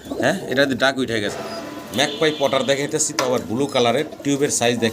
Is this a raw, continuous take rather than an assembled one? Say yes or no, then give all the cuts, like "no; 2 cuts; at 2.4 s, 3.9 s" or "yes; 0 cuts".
no; 1 cut; at 1.3 s